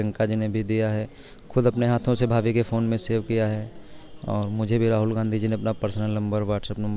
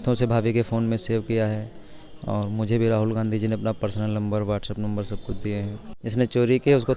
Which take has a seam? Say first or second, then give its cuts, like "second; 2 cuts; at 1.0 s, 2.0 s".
second; 1 cut; at 5.9 s